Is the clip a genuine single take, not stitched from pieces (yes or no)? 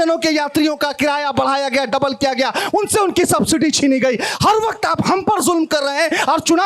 yes